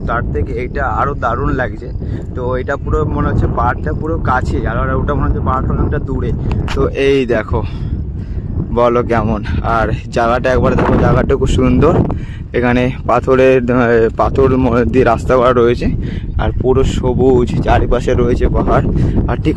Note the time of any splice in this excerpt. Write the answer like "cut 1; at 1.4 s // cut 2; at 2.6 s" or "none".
none